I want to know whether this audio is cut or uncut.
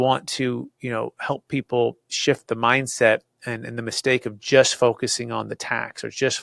uncut